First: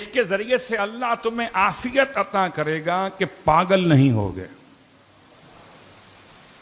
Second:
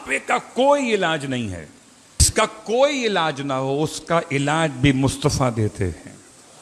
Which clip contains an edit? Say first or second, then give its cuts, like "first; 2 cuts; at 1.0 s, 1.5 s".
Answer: second; 1 cut; at 2.3 s